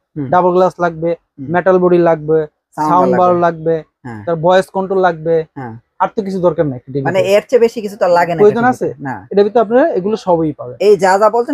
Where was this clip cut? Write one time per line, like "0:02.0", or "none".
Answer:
none